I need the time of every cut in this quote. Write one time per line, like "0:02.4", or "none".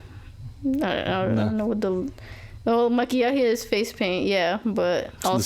none